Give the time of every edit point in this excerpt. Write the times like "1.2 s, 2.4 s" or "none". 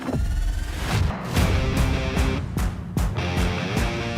1.1 s